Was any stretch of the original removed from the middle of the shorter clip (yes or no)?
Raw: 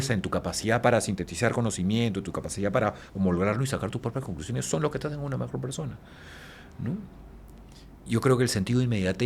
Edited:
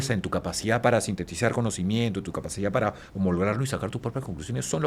no